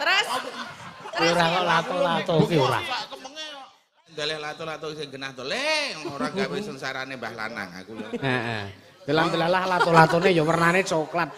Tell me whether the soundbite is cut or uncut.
cut